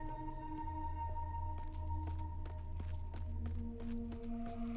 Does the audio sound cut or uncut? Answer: uncut